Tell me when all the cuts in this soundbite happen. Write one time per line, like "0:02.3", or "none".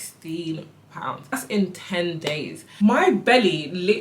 0:01.3
0:02.6